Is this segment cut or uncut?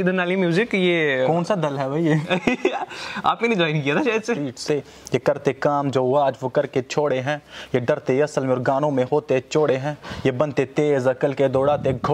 cut